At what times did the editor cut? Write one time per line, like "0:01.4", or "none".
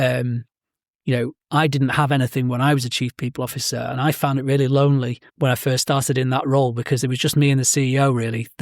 0:05.2